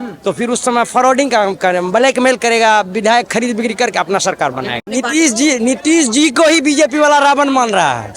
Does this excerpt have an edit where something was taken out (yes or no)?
yes